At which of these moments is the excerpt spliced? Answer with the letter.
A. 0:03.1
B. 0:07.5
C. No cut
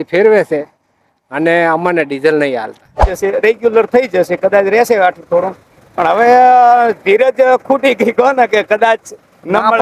A